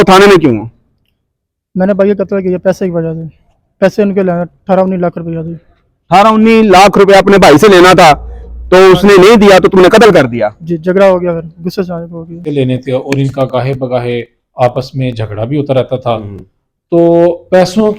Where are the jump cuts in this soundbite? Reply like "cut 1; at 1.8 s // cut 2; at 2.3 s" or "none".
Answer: cut 1; at 12.4 s